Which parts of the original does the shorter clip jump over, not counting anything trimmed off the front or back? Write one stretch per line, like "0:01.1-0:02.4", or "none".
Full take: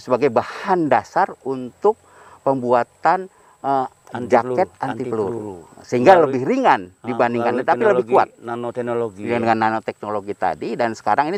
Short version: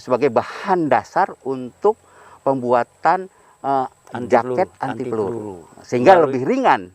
none